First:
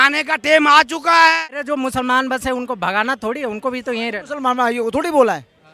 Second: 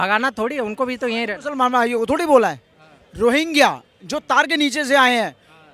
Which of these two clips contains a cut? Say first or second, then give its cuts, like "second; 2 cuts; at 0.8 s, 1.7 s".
first; 1 cut; at 1.4 s